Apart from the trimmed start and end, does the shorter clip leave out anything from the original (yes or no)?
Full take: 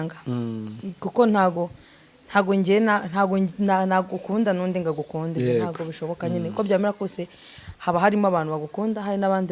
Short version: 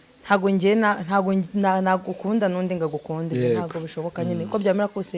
no